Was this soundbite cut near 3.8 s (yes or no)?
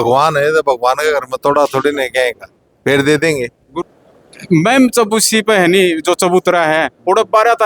yes